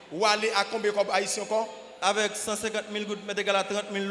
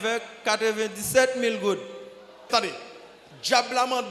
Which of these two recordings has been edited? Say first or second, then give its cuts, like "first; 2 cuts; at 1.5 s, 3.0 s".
second; 1 cut; at 2.5 s